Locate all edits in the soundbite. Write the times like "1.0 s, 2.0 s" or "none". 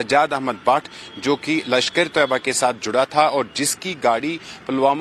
none